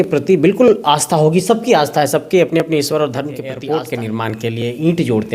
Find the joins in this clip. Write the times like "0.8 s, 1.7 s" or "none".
3.4 s